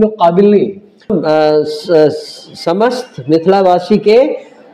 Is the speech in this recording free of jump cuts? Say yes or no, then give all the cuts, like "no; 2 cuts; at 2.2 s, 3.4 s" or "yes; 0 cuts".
no; 1 cut; at 1.1 s